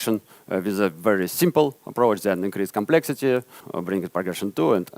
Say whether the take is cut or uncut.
cut